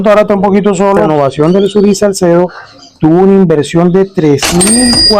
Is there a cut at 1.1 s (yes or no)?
yes